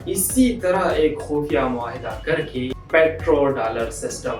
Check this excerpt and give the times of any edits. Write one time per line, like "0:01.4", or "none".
0:02.8